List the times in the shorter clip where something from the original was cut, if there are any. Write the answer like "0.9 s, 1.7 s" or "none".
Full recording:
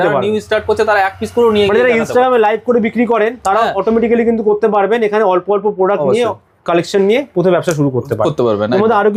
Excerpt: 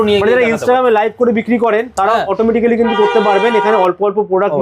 none